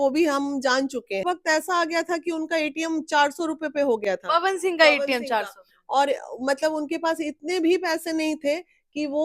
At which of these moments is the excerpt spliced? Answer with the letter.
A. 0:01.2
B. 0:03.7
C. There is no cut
A